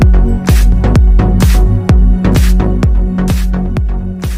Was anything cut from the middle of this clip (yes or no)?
no